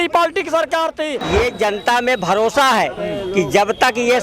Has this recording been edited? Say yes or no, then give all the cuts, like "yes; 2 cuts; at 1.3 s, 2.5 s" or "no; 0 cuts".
yes; 1 cut; at 1.2 s